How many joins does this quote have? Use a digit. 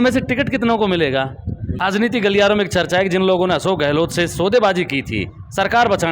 1